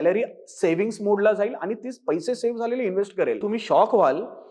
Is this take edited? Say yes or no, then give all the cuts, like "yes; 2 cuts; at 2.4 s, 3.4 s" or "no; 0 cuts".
yes; 1 cut; at 3.4 s